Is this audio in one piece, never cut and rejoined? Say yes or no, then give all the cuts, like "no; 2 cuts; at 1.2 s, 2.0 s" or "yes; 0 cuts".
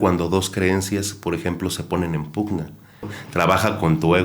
no; 1 cut; at 3.2 s